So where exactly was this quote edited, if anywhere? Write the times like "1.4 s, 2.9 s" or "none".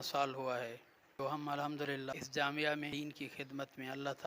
1.0 s, 1.9 s, 2.9 s